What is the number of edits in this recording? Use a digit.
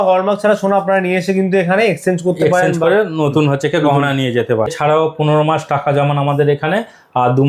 1